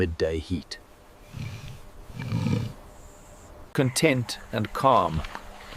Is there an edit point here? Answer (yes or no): yes